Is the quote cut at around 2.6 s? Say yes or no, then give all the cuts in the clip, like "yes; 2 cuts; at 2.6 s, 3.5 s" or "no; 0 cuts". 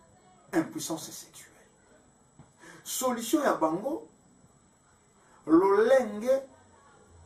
no; 0 cuts